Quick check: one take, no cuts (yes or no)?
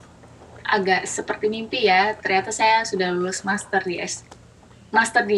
yes